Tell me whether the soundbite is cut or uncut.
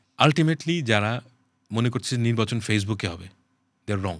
uncut